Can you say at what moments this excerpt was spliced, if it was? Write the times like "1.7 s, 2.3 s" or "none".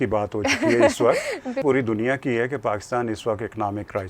1.6 s